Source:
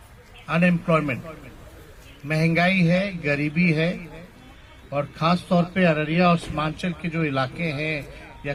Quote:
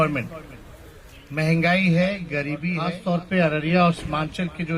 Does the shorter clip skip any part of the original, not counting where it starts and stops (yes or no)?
yes